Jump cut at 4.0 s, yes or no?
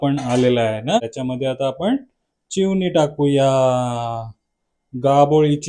no